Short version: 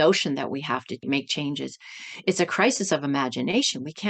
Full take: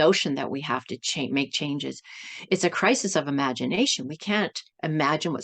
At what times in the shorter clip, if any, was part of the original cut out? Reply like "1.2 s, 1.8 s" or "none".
1.0 s